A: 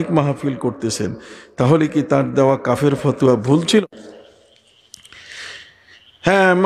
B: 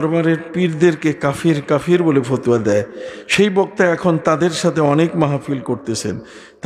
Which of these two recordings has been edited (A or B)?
A